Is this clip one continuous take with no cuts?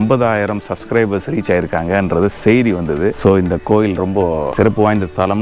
no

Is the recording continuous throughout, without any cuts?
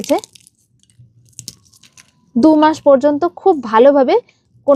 yes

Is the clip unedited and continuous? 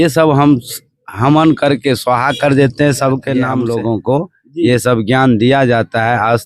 no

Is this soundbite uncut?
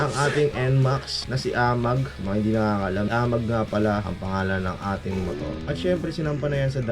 no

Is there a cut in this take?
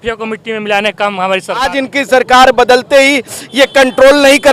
yes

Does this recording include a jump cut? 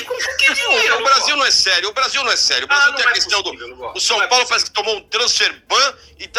no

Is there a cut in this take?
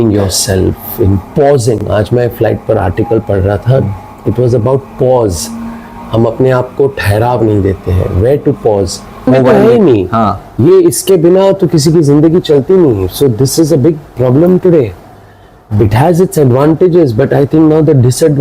yes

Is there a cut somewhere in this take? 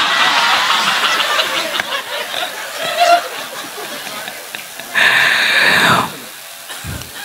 no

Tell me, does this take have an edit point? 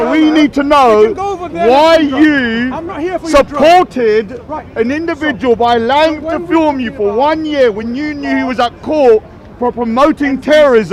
no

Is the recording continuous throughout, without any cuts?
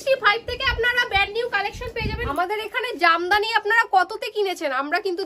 no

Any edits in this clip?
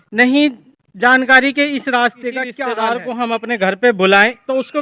yes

